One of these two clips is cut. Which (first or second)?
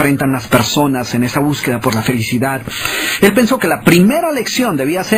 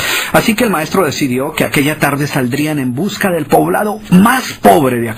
first